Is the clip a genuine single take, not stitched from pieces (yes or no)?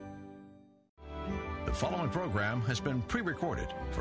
no